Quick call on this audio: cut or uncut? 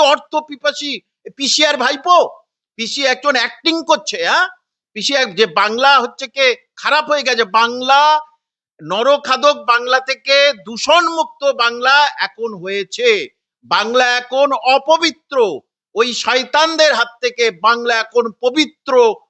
uncut